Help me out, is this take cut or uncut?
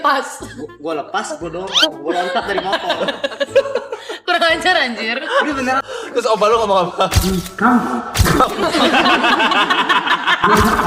cut